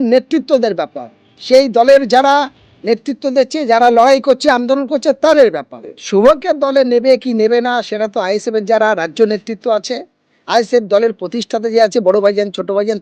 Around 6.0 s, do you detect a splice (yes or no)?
yes